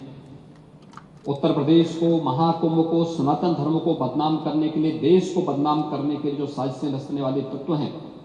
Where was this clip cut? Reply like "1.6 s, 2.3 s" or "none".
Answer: none